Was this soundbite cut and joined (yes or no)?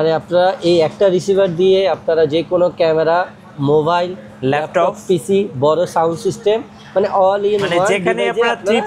no